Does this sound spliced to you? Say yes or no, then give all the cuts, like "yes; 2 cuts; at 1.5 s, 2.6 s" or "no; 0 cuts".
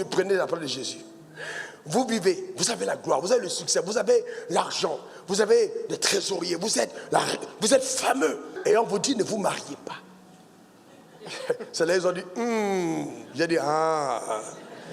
yes; 1 cut; at 8.5 s